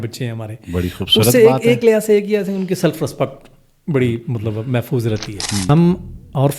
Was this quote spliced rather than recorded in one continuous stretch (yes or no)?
yes